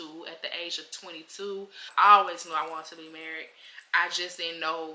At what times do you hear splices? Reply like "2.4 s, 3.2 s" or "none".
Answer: 1.9 s